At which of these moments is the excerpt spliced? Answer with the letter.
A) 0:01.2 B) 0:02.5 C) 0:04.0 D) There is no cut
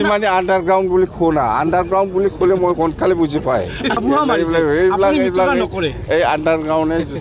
C